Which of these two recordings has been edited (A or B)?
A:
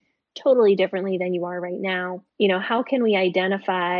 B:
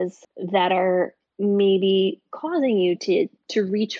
A